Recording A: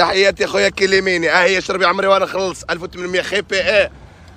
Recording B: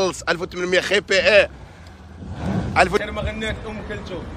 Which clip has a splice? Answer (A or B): B